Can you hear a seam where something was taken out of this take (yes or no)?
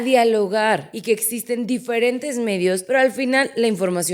yes